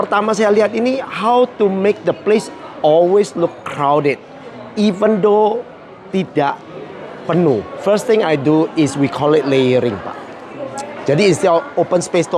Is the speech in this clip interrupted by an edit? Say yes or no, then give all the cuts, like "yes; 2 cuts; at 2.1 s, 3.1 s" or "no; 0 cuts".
yes; 1 cut; at 7.7 s